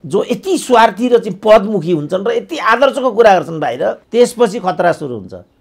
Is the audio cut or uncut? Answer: cut